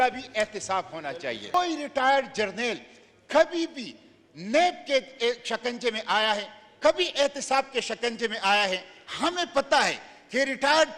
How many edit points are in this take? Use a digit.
1